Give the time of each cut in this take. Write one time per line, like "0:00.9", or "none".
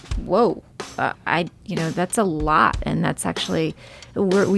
0:01.1